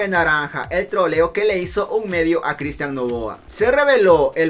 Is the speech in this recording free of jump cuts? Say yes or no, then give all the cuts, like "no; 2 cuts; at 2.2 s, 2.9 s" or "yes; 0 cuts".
no; 1 cut; at 3.4 s